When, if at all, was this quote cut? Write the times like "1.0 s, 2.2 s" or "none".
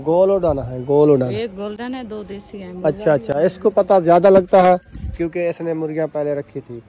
none